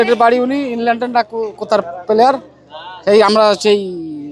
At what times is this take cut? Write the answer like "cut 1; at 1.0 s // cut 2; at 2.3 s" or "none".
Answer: none

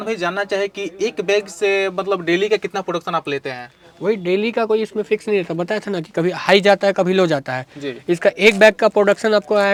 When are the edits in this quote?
none

